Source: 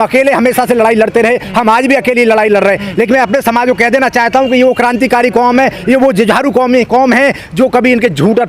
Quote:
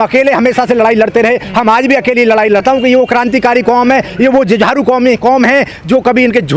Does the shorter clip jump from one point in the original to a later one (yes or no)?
yes